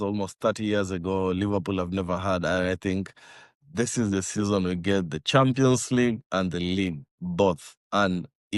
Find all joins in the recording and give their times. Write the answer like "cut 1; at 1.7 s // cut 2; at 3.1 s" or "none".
none